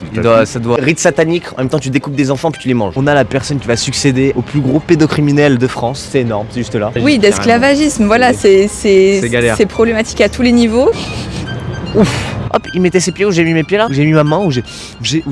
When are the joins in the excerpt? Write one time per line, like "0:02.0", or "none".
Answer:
0:00.8
0:02.9
0:04.3
0:07.0
0:11.0
0:12.4

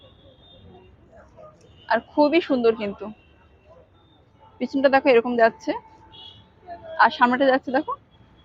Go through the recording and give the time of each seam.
none

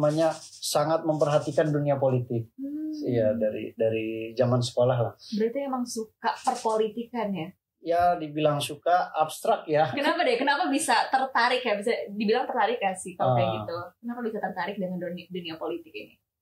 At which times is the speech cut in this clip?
none

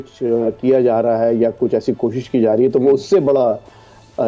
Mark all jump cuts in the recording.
none

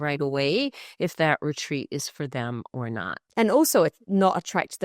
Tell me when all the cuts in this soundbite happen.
0:03.2

